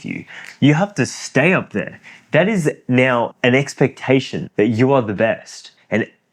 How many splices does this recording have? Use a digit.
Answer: 1